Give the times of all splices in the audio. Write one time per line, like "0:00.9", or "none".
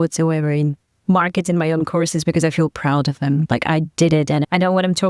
none